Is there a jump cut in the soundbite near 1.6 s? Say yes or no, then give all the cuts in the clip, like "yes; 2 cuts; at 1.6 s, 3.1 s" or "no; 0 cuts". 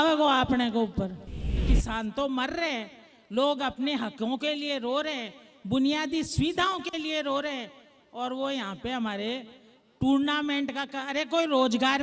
yes; 1 cut; at 1.6 s